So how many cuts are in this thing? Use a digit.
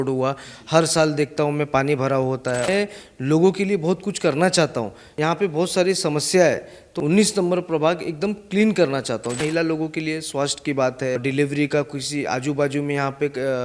5